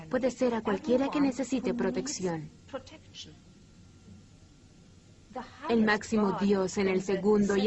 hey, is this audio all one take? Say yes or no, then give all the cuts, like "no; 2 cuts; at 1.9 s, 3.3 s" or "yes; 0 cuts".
yes; 0 cuts